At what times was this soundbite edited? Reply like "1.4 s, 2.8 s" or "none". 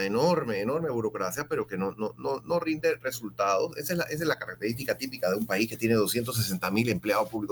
none